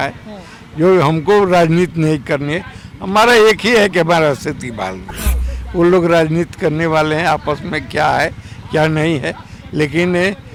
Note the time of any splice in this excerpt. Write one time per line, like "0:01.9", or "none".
none